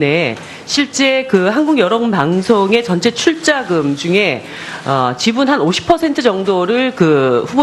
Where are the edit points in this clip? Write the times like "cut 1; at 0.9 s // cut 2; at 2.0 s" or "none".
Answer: none

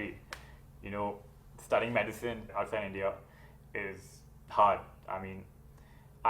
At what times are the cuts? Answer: cut 1; at 2.5 s

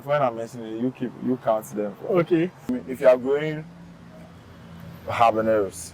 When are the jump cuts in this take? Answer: cut 1; at 2.8 s

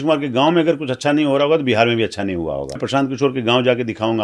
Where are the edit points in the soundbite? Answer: cut 1; at 2.8 s

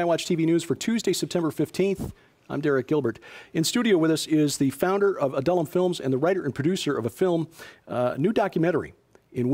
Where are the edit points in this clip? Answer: none

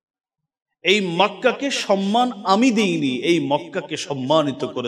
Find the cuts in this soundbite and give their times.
none

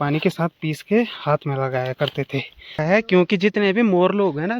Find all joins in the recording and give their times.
cut 1; at 2.7 s

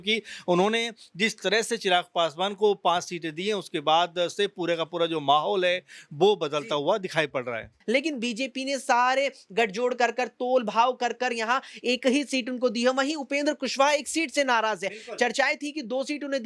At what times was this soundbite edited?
cut 1; at 7.7 s

